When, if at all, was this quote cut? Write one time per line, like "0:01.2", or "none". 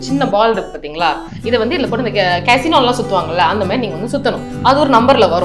none